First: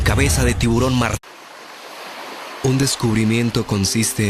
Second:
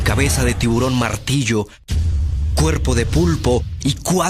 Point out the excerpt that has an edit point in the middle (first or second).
second